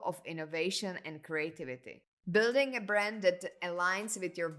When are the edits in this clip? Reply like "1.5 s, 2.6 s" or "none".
2.1 s